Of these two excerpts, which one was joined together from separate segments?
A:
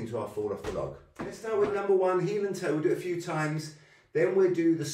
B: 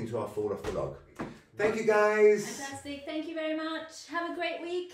A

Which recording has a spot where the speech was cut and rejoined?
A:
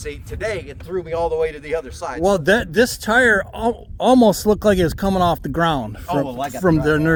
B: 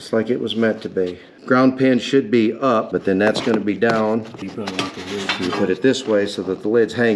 B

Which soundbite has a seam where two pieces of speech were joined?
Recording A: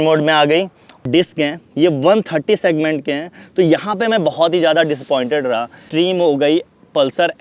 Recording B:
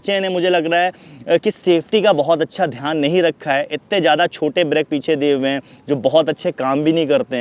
A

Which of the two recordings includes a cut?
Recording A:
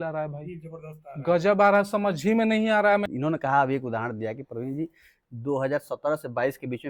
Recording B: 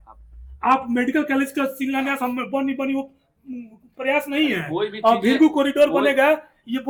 A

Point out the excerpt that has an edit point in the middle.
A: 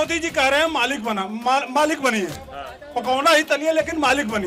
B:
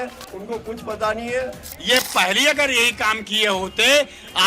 B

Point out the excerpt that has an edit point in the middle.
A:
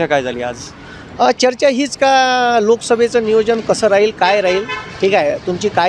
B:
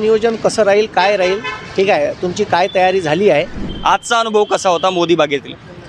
B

